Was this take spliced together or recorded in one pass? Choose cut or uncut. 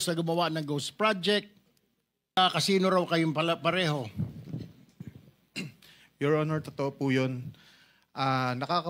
cut